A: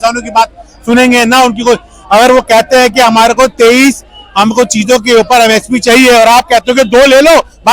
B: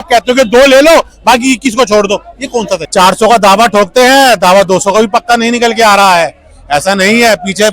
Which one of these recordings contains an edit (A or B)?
B